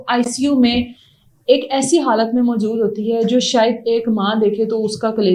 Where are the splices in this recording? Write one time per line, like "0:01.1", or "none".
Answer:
none